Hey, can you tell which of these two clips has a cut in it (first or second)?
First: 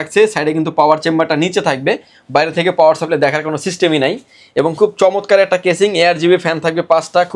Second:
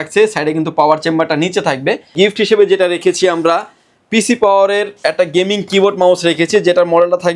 second